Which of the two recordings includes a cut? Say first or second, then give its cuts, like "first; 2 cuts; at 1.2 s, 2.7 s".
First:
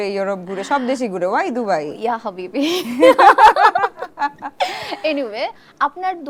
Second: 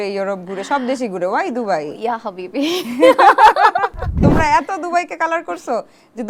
second; 1 cut; at 4.1 s